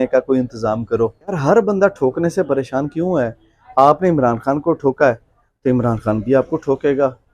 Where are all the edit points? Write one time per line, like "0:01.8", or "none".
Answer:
0:01.4

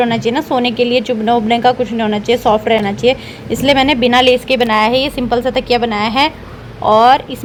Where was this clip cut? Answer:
none

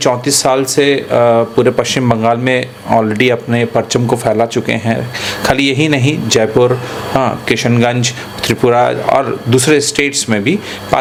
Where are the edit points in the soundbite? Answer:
none

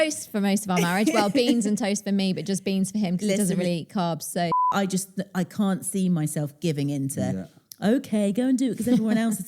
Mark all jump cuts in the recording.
0:04.7

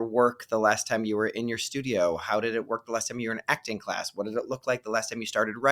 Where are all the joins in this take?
none

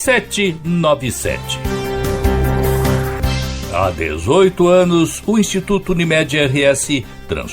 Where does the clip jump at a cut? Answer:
0:01.5
0:03.6

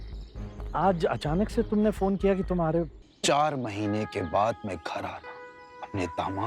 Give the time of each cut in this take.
0:03.0

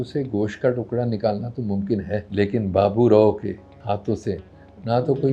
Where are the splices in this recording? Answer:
0:02.3
0:03.7

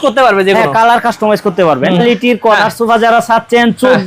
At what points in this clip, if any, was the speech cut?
0:01.9

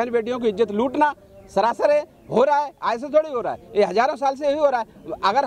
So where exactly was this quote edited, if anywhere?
none

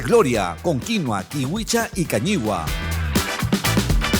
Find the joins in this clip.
0:02.6

